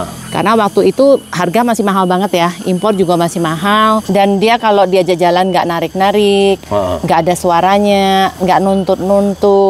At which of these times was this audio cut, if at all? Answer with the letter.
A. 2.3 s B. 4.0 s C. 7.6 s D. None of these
B